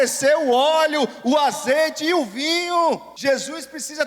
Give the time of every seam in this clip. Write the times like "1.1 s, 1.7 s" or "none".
3.1 s